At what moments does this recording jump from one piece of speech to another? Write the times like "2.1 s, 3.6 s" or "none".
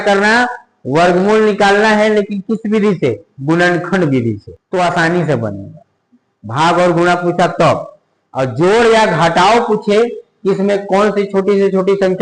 4.5 s